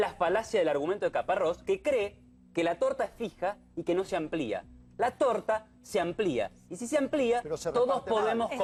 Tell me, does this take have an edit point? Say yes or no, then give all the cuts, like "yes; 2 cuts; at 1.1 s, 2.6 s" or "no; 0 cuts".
no; 0 cuts